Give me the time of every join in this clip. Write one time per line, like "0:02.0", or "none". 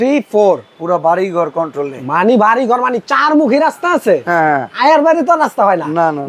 none